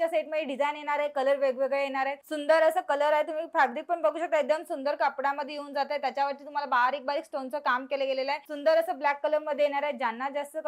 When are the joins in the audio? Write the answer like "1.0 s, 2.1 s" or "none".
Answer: 2.2 s, 8.5 s

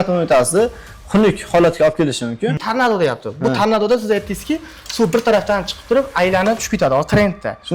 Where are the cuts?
2.6 s

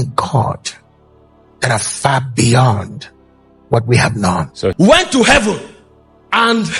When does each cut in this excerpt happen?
4.7 s

